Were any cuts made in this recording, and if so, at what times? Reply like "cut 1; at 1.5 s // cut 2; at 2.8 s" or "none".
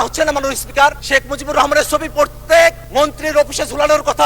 cut 1; at 1.0 s // cut 2; at 2.8 s